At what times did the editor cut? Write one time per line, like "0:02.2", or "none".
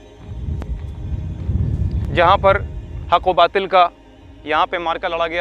0:02.1